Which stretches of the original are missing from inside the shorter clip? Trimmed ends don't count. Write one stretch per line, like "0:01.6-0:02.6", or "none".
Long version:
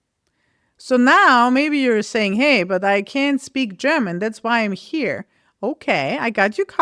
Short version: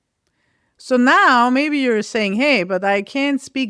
none